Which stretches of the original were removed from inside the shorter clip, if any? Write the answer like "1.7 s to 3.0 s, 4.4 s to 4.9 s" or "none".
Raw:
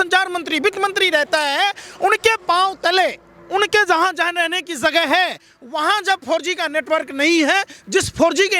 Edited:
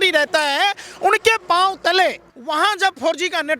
3.3 s to 5.6 s

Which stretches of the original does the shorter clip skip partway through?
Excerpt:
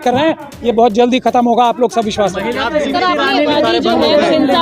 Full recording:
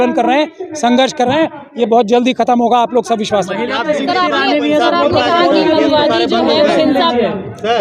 4.7 s to 6.0 s

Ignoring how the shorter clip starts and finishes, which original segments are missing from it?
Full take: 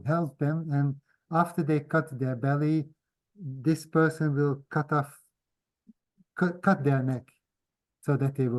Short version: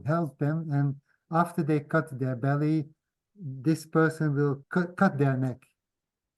4.6 s to 6.3 s

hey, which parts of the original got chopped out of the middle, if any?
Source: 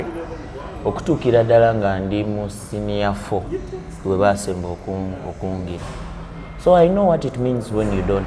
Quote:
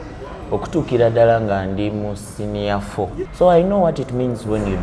3.6 s to 6.6 s

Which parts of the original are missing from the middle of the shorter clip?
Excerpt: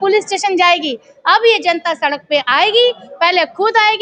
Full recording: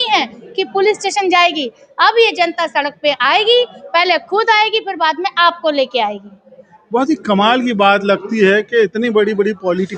none

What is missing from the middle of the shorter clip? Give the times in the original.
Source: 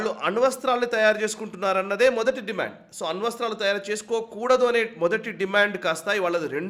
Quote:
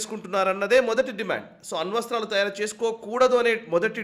none

